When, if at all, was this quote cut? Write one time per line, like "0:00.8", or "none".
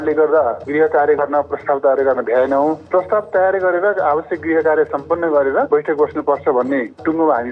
0:01.2
0:05.7